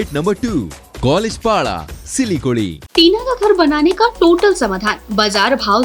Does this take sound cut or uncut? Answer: cut